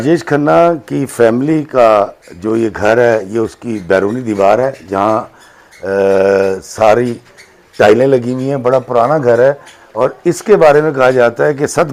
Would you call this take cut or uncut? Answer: uncut